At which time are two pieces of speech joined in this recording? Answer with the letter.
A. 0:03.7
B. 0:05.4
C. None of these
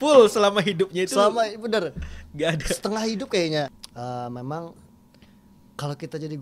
A